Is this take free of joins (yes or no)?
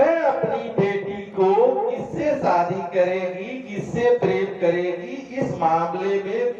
yes